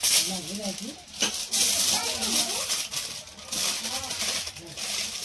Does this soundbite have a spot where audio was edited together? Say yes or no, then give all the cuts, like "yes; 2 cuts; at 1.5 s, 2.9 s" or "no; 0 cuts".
no; 0 cuts